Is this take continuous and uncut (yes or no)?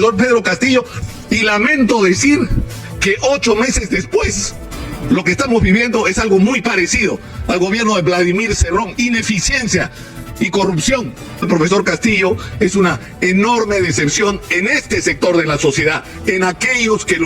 no